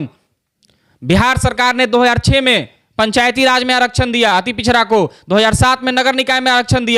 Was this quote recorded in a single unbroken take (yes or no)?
yes